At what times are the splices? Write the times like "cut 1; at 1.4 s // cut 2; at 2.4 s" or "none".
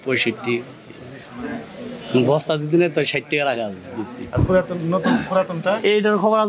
none